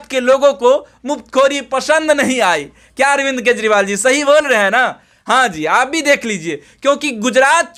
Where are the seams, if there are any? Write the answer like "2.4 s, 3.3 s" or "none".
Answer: none